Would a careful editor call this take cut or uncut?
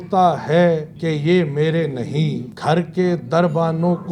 cut